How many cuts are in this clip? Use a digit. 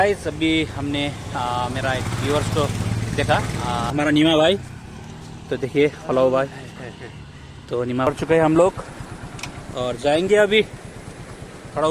2